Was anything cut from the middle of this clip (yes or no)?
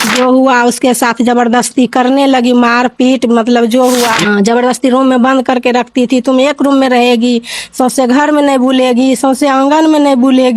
yes